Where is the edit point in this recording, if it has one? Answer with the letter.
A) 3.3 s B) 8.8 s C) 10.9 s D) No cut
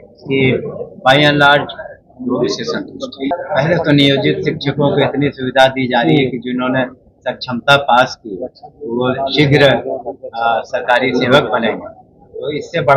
A